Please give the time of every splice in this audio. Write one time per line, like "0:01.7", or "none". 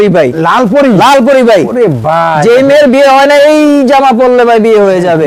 none